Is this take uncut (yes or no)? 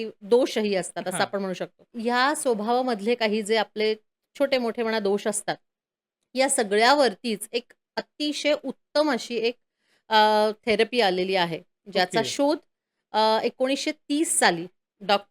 no